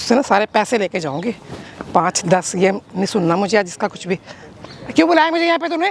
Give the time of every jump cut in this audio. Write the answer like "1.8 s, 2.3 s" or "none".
none